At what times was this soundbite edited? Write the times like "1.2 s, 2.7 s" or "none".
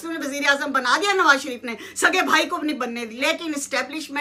none